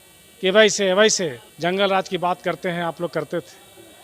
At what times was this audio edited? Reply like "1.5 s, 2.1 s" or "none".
1.4 s

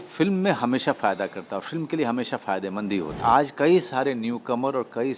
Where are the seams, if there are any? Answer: 3.2 s

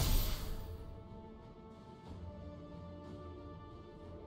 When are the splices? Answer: none

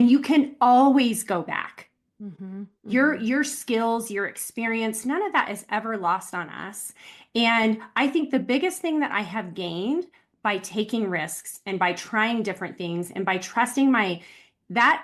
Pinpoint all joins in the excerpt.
none

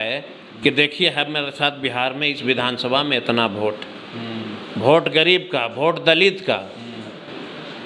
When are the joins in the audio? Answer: none

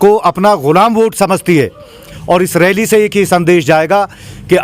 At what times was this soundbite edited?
2.1 s

